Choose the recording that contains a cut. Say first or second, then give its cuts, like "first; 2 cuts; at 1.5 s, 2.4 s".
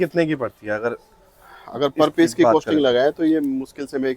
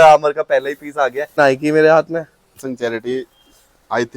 second; 2 cuts; at 1.4 s, 2.6 s